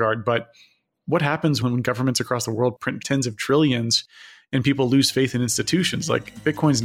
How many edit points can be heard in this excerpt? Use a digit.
2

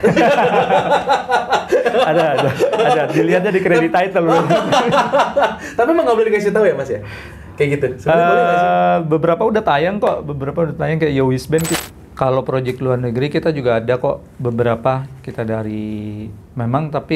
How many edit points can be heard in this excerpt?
1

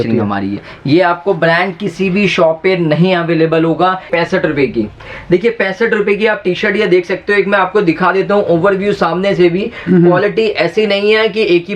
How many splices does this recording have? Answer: 1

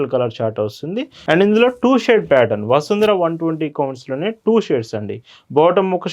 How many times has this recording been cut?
1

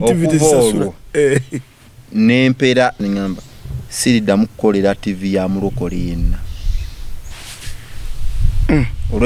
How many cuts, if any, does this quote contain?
1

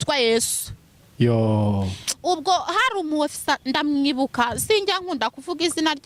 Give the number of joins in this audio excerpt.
0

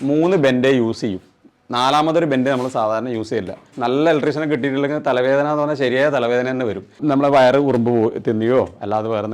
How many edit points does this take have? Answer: 2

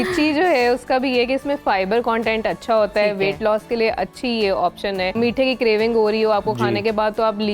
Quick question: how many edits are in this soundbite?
1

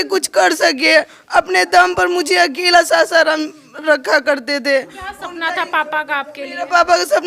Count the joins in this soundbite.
0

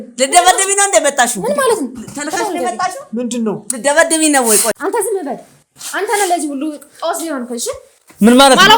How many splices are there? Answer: 1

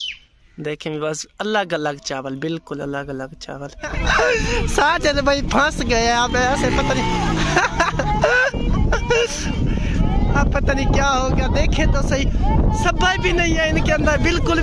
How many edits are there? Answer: 1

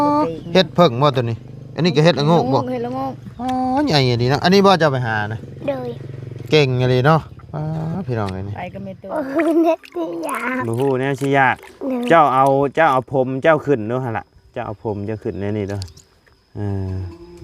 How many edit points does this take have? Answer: 1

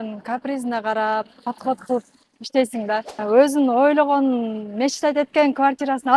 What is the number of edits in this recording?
1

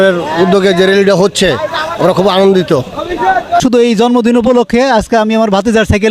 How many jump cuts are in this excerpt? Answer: 1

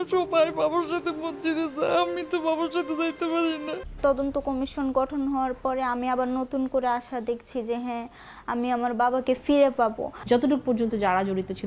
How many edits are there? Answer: 2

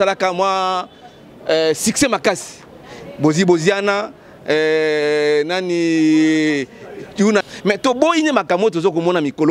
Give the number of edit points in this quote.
1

